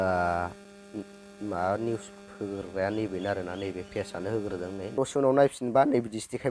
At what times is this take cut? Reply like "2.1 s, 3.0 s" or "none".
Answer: 4.9 s